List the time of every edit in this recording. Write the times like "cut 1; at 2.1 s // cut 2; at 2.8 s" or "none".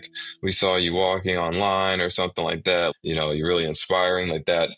cut 1; at 2.9 s